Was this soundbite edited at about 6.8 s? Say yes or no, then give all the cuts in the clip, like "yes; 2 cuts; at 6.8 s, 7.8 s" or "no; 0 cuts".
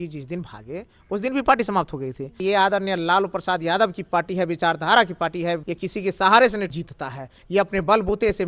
yes; 3 cuts; at 2.4 s, 5.7 s, 6.8 s